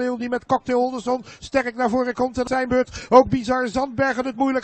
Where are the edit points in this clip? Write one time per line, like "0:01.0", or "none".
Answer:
0:02.5

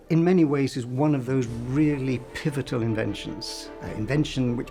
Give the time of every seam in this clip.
none

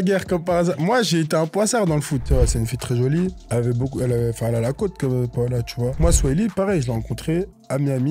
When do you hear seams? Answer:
0:02.2
0:05.9

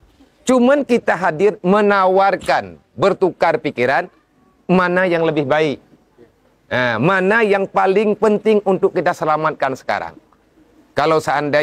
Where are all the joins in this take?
none

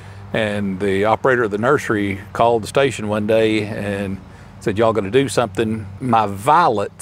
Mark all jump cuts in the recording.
0:06.0

